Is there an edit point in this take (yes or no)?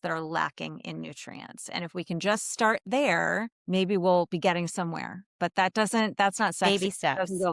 yes